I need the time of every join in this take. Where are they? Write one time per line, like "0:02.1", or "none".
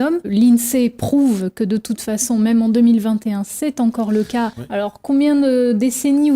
0:04.5